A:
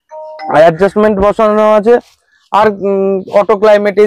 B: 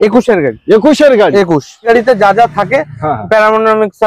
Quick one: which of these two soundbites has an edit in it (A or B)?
B